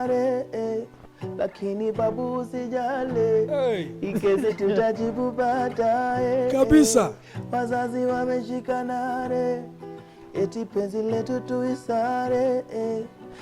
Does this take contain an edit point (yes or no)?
no